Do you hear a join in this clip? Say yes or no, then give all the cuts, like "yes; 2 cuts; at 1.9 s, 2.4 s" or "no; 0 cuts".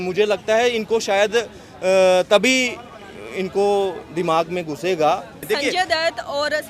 yes; 1 cut; at 5.4 s